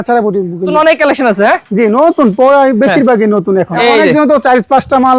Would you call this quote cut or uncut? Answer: cut